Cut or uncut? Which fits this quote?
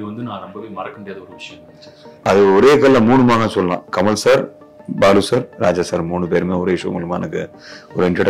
cut